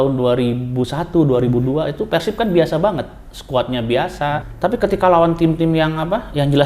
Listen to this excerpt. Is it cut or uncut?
cut